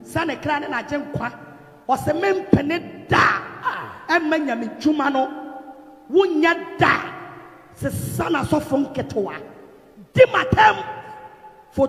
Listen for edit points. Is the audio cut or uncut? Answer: uncut